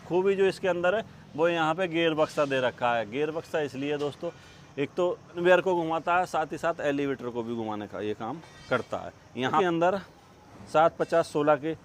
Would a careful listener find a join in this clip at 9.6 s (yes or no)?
yes